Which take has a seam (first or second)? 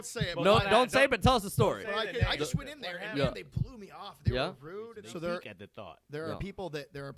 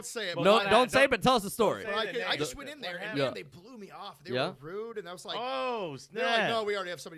first